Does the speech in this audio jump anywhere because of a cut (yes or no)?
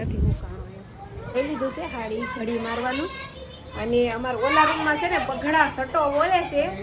yes